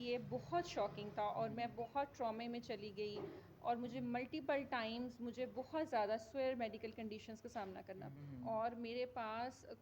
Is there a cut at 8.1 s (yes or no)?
yes